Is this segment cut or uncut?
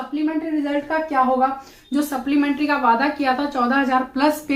uncut